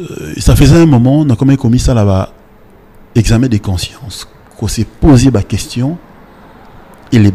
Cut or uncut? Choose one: uncut